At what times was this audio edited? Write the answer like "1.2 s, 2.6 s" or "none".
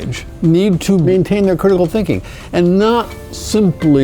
1.1 s